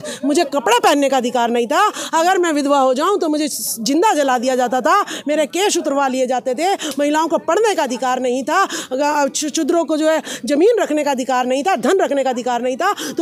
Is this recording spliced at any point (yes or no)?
no